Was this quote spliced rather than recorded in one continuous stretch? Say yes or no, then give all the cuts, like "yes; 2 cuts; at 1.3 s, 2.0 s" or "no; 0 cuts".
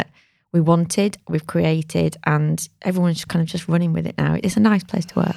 yes; 1 cut; at 4.4 s